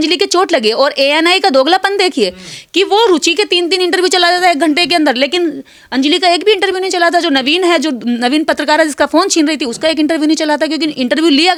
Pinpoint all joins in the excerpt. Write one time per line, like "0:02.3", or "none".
none